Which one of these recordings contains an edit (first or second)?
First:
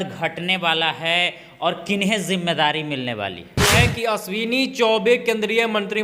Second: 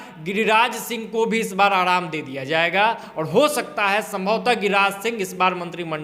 first